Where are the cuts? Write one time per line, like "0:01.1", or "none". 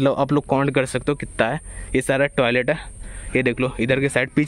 none